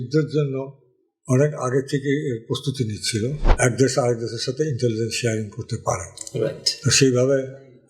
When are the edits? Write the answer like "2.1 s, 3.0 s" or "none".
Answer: 3.4 s